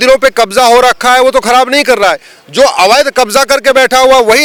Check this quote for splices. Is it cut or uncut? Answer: uncut